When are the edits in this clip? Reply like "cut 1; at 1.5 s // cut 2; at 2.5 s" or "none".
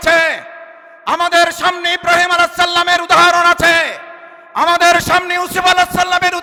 none